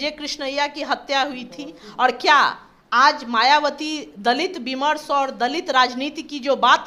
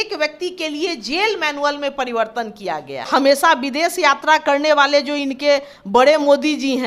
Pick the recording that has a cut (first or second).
second